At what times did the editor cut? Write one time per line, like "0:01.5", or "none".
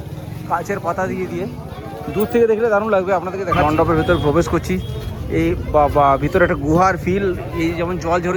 0:03.6